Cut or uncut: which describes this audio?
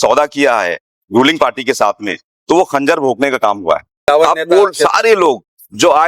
cut